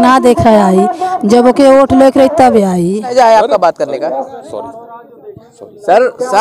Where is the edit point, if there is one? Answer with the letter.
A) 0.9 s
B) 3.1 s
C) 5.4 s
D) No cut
B